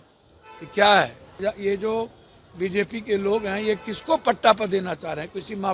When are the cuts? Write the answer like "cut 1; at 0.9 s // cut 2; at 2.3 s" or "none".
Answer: cut 1; at 1.4 s